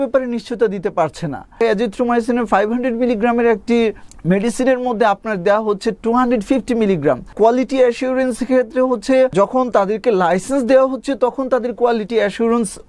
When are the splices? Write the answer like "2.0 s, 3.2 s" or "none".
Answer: 1.6 s, 4.1 s, 7.3 s, 9.3 s